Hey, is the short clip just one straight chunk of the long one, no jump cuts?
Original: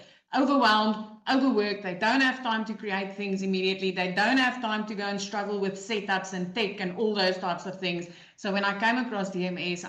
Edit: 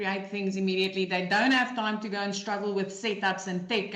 yes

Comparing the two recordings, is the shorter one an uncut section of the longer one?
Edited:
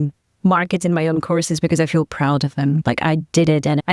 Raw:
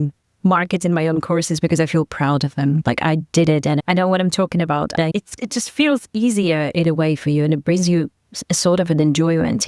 yes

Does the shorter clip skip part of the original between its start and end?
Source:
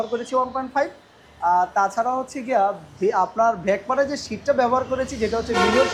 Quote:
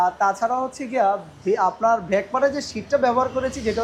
no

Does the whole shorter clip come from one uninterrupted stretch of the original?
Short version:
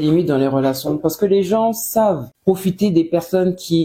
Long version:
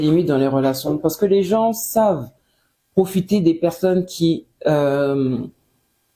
no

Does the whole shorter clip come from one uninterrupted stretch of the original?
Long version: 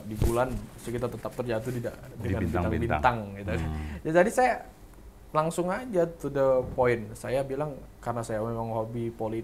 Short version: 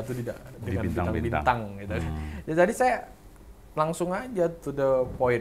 yes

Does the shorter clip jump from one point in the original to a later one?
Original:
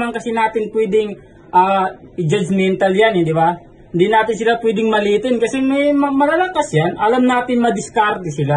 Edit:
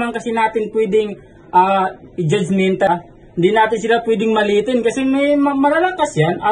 yes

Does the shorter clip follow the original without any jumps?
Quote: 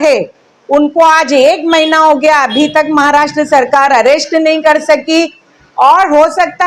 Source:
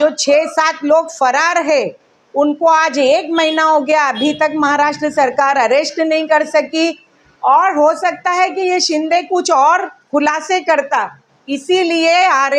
yes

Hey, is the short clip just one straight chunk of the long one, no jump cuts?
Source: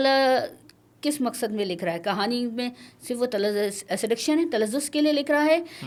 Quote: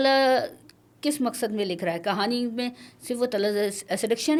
yes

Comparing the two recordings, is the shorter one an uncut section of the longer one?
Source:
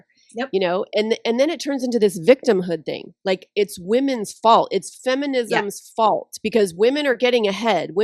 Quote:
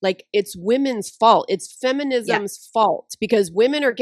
yes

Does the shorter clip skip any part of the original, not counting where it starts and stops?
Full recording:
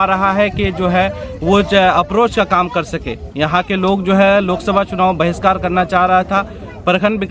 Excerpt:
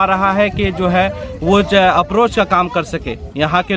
no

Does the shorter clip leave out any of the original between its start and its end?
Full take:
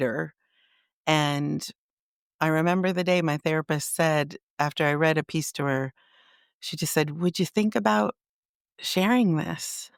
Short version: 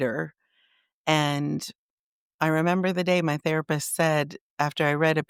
no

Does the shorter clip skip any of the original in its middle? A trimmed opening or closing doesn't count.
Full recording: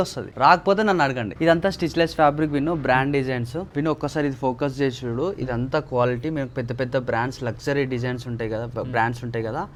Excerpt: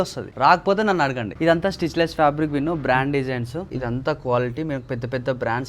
yes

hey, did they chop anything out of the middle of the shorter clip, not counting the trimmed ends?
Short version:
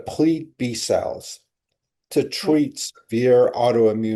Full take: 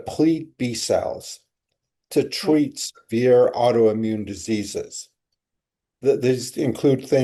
no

